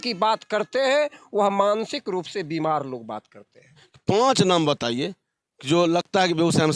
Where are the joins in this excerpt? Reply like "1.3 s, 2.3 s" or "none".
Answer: 3.8 s